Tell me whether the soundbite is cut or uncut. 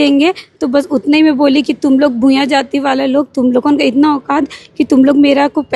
uncut